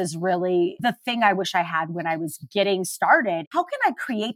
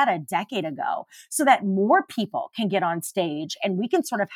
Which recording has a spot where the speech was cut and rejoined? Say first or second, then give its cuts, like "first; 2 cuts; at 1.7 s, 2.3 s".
first; 3 cuts; at 0.8 s, 2.4 s, 3.4 s